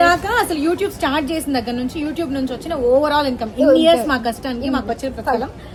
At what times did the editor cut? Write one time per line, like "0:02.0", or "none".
none